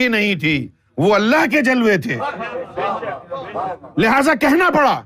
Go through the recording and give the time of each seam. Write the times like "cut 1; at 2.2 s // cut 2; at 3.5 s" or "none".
cut 1; at 3.8 s